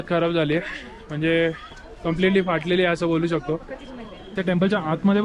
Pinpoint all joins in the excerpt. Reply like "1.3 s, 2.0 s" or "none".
4.3 s